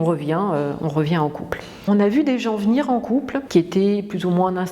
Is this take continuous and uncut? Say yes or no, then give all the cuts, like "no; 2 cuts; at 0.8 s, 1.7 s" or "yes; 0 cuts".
no; 1 cut; at 1.7 s